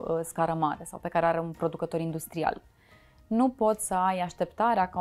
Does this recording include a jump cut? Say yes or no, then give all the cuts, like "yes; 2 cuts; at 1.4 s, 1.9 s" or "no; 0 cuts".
no; 0 cuts